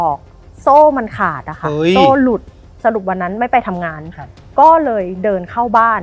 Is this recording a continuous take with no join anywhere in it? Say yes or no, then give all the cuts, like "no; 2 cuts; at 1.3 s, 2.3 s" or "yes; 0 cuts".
no; 1 cut; at 2.8 s